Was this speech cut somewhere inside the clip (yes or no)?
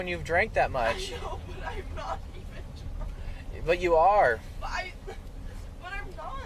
no